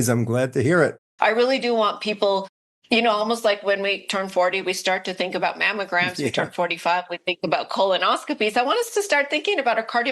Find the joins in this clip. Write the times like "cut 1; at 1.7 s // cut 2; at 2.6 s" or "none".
cut 1; at 1.0 s